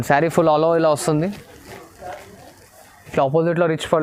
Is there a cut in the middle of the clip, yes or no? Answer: no